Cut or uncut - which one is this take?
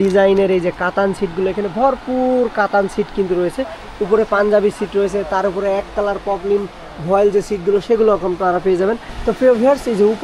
uncut